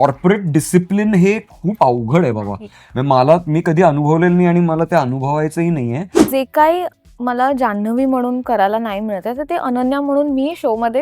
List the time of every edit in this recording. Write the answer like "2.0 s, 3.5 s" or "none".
6.2 s